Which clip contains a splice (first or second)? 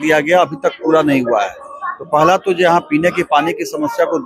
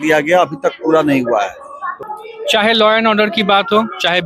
second